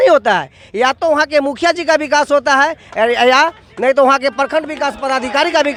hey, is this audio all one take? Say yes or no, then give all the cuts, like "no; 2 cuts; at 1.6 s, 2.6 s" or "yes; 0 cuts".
yes; 0 cuts